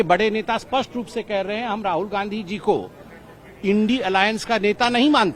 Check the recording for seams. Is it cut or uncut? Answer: uncut